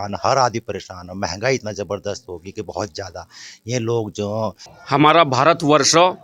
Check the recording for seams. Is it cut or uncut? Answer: cut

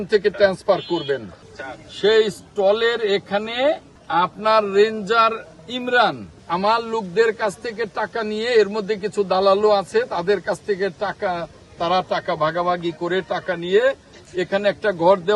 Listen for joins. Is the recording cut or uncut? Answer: cut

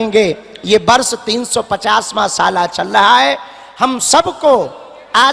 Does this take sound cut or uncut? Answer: uncut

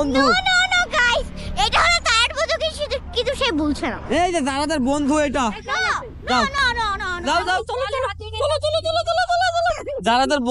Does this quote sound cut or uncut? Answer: uncut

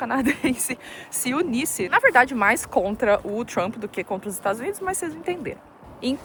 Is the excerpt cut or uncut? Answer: uncut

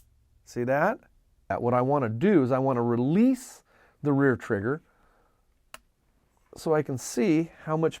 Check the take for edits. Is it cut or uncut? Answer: cut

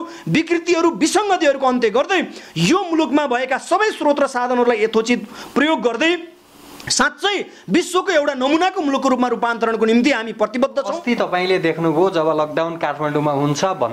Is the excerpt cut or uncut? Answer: cut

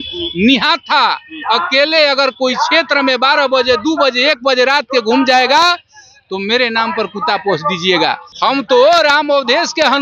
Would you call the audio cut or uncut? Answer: cut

